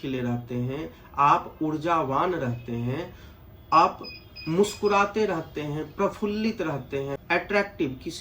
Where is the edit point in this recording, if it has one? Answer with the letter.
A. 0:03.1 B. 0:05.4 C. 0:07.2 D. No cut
C